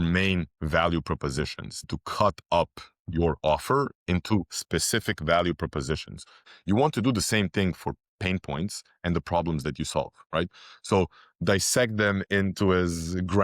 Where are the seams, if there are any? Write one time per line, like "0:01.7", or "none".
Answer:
0:06.3